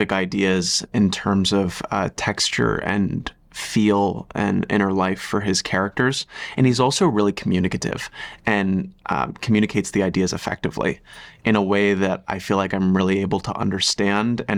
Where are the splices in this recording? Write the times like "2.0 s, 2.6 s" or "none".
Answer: none